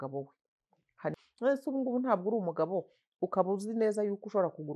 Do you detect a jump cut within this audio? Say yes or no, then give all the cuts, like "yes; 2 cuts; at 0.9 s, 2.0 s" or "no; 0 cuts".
yes; 1 cut; at 1.2 s